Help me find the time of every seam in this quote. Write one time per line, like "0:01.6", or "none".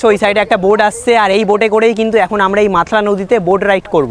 none

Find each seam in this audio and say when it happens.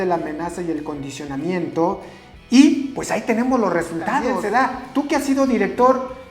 0:04.4

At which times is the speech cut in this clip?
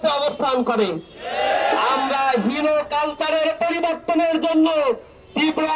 none

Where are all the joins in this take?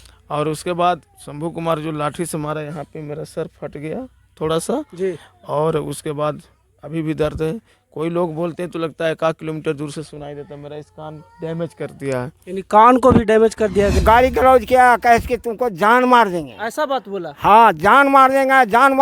0:14.0

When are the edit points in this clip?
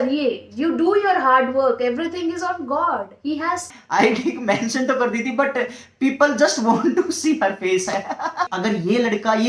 0:03.7
0:08.5

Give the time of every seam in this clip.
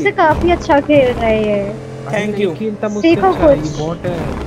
none

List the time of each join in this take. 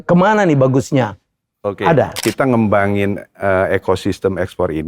0:02.2

